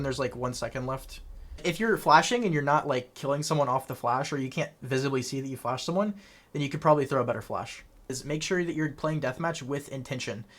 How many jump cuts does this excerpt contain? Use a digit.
2